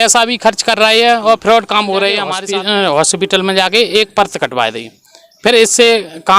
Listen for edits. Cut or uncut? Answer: cut